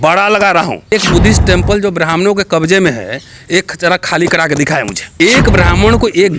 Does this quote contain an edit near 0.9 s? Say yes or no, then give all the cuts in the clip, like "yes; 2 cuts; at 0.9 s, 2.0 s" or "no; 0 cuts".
yes; 2 cuts; at 0.9 s, 5.0 s